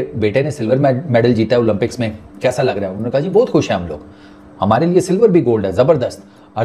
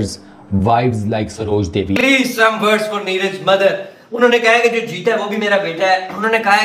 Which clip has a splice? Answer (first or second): second